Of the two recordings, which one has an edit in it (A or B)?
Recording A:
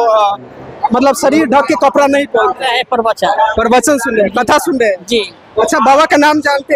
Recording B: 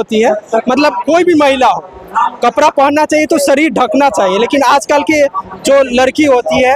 A